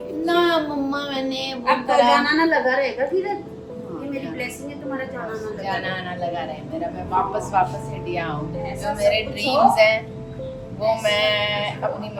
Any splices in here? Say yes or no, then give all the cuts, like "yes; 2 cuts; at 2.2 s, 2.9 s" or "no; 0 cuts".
no; 0 cuts